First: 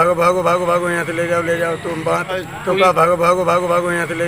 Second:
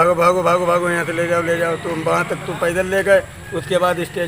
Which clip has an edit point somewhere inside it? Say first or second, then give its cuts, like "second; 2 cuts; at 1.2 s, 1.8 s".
second; 1 cut; at 2.2 s